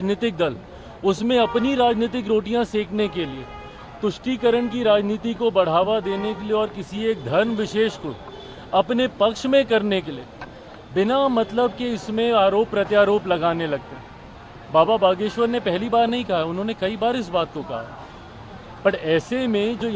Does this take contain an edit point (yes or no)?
no